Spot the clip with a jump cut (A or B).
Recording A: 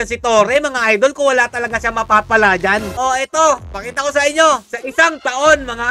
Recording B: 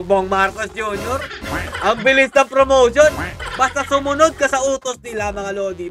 A